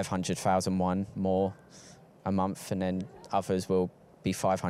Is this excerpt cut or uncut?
uncut